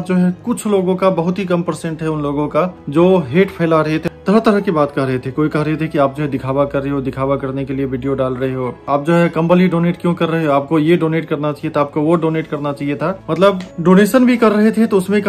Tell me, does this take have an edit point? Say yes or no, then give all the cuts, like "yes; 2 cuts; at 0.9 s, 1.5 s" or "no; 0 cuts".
no; 0 cuts